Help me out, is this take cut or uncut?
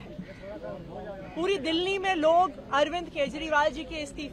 uncut